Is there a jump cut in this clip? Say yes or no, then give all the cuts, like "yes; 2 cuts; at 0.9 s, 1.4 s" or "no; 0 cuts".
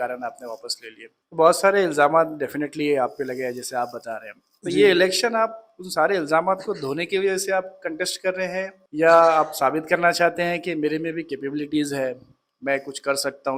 no; 0 cuts